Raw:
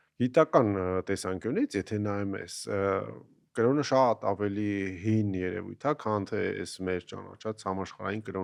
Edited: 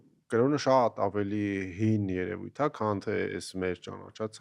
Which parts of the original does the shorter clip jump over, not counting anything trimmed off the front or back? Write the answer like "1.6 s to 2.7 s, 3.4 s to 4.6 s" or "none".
none